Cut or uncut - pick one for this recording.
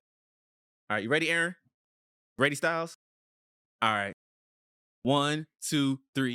uncut